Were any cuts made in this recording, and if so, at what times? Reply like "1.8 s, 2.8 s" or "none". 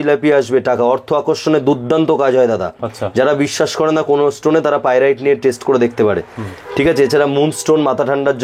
none